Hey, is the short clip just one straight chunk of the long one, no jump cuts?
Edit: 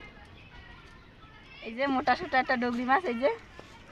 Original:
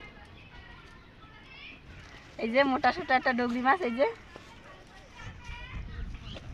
no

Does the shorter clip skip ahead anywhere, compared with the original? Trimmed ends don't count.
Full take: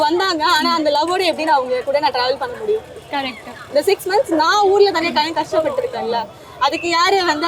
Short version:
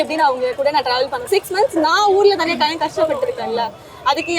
yes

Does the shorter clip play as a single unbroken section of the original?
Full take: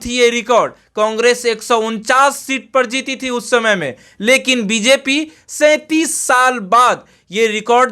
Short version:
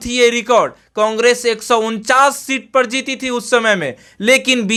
yes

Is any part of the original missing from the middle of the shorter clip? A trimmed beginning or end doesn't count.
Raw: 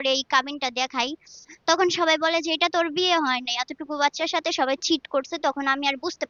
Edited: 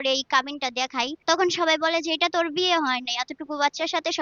yes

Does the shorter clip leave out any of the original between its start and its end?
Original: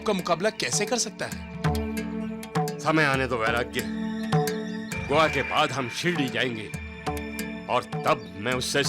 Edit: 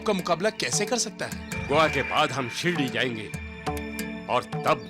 yes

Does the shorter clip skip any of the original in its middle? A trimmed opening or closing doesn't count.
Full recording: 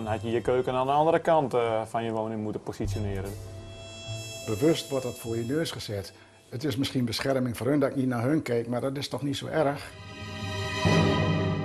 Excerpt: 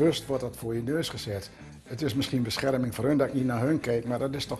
no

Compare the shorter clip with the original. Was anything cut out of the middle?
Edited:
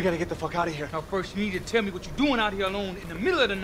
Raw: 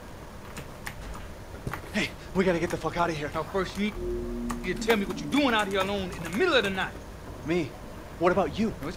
yes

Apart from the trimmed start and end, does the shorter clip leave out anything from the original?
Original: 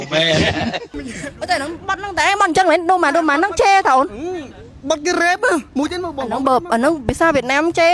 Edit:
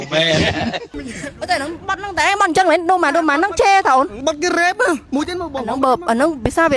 yes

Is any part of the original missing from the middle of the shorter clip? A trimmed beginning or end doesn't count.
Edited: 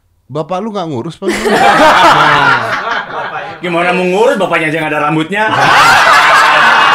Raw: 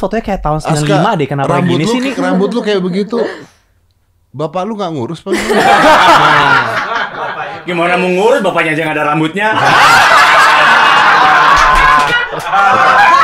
no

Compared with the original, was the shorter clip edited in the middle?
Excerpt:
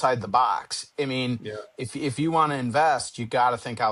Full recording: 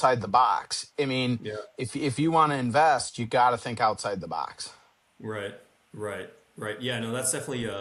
no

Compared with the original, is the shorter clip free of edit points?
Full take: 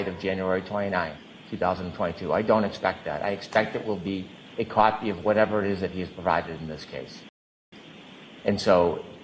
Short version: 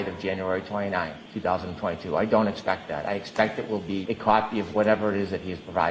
no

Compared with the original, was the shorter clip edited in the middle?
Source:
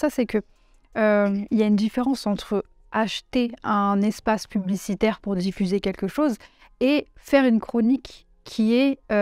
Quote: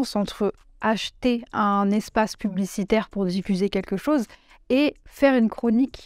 no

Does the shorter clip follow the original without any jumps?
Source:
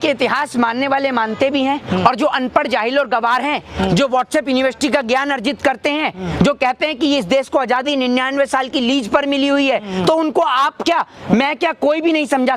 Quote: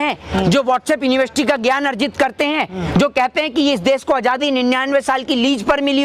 yes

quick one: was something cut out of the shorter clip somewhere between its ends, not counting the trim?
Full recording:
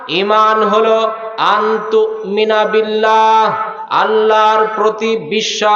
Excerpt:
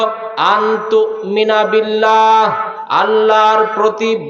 no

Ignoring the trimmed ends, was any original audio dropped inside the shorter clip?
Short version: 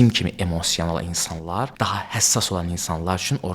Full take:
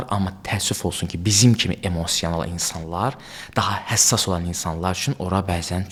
yes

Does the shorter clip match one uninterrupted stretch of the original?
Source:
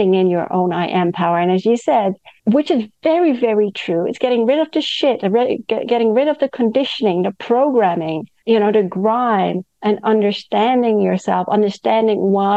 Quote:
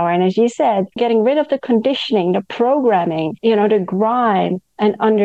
no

